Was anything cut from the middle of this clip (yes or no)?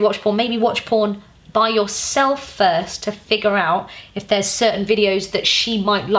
no